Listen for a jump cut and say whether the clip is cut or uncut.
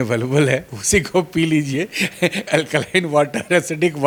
uncut